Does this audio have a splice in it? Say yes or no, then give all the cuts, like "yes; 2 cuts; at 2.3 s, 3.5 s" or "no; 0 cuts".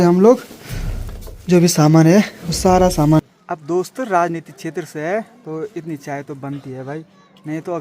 yes; 1 cut; at 3.2 s